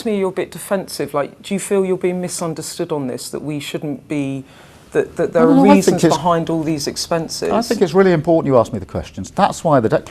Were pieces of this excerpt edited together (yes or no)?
no